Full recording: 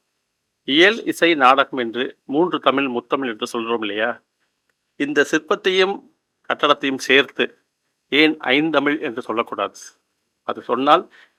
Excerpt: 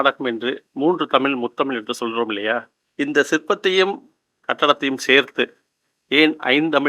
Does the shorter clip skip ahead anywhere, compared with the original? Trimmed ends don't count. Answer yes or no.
yes